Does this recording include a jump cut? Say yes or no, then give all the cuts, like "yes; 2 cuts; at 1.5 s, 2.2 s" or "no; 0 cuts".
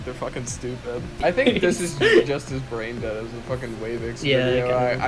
yes; 1 cut; at 1.2 s